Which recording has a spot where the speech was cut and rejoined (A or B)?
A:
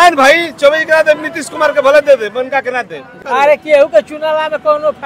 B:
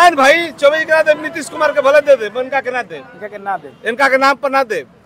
A